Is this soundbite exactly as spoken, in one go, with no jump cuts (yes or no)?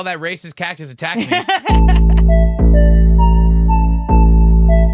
no